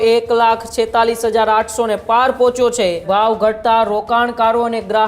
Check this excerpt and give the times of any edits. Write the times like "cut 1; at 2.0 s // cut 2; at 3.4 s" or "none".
cut 1; at 3.0 s